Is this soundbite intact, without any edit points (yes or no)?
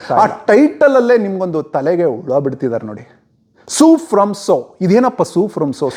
yes